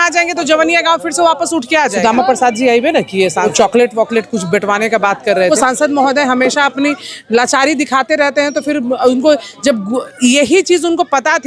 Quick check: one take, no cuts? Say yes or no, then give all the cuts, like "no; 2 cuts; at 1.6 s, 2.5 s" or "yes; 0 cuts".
no; 3 cuts; at 1.9 s, 3.5 s, 5.5 s